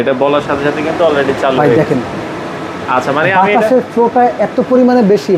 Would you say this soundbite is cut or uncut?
uncut